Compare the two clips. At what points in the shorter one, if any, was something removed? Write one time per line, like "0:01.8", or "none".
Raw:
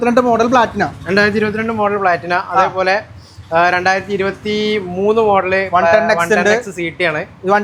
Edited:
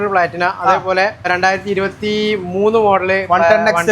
0:01.3